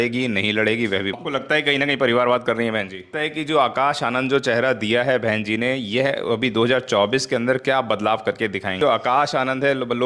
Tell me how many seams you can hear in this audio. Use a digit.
3